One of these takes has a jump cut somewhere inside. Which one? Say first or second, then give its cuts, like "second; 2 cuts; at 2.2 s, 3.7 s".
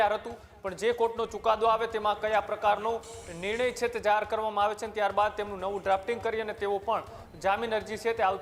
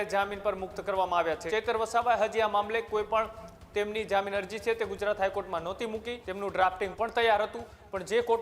second; 2 cuts; at 1.4 s, 6.2 s